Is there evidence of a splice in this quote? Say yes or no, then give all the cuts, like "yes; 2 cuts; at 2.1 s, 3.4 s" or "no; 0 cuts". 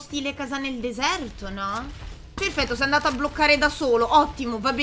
yes; 1 cut; at 2.0 s